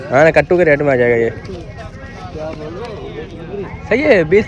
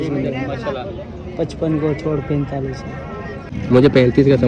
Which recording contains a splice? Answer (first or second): second